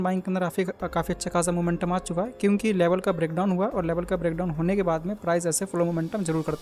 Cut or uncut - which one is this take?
uncut